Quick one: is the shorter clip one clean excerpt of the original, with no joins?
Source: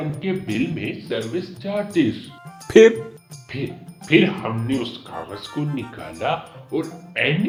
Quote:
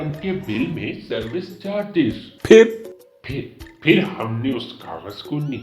no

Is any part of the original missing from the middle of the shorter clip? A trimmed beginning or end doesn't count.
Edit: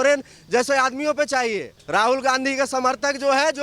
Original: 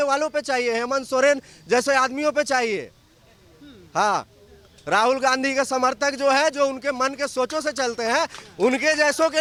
yes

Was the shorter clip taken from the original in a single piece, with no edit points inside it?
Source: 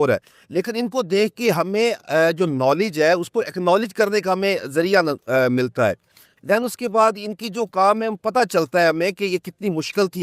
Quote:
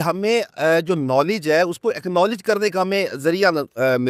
yes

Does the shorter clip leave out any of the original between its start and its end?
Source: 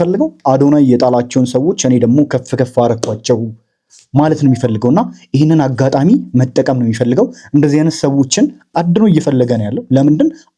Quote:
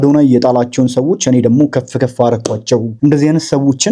yes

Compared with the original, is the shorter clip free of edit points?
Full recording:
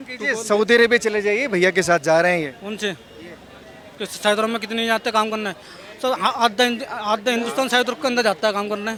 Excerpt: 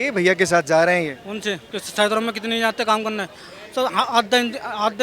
no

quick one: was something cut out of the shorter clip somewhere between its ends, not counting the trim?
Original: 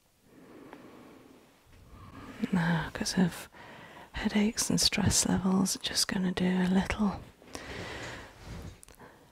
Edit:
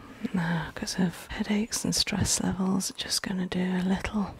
yes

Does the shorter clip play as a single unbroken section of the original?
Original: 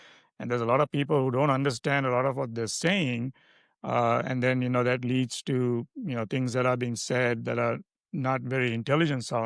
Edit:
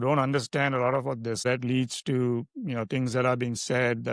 no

